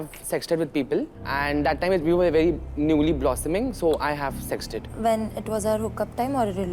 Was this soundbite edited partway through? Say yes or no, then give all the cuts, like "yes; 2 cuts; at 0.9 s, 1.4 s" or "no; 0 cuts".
no; 0 cuts